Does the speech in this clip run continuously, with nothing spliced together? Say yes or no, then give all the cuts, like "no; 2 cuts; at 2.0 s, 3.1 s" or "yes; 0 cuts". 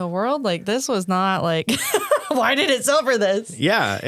yes; 0 cuts